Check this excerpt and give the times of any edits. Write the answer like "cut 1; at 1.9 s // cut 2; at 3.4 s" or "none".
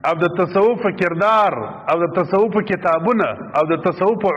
none